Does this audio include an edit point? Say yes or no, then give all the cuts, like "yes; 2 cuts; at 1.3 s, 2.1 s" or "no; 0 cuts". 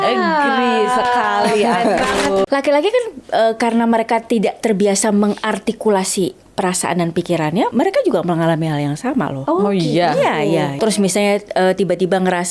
yes; 4 cuts; at 2.5 s, 7.7 s, 9.4 s, 10.7 s